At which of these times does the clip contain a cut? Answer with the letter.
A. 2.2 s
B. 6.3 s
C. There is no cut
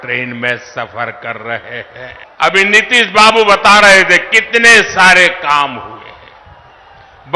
A